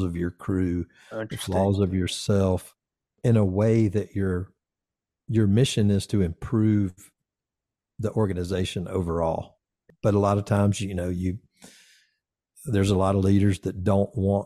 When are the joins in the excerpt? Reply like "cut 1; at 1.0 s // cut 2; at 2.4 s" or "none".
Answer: cut 1; at 3.1 s // cut 2; at 9.9 s